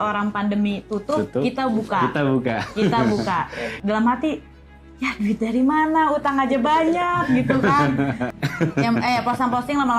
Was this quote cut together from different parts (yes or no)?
yes